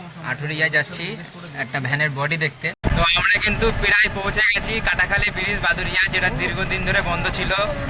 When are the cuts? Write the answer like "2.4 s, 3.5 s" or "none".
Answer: 2.7 s